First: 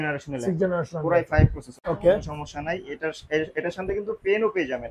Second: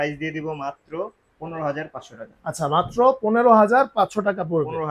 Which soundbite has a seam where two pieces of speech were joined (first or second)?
first